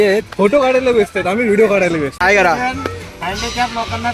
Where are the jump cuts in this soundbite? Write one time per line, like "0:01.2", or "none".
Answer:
0:02.2